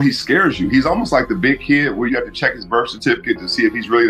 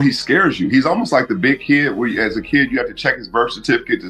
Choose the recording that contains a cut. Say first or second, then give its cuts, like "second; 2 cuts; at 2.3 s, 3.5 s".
first; 1 cut; at 2.1 s